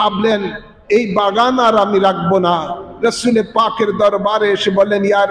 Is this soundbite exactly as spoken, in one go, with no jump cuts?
yes; 0 cuts

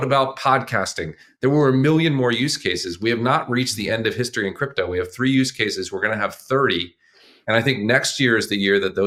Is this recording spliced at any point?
no; 0 cuts

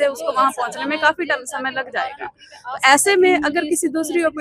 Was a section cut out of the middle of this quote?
no; 0 cuts

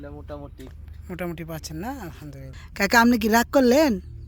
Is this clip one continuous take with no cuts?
no; 1 cut; at 2.6 s

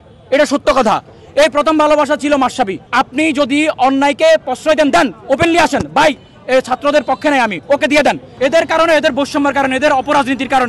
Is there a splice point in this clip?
yes; 2 cuts; at 2.8 s, 8.3 s

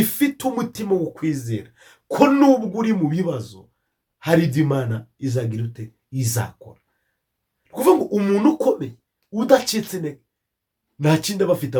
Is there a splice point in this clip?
no; 0 cuts

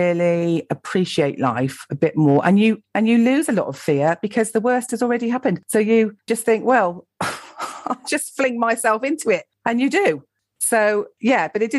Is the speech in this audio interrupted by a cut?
no; 0 cuts

